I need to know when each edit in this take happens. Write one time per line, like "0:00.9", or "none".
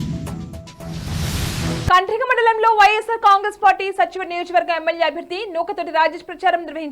0:01.7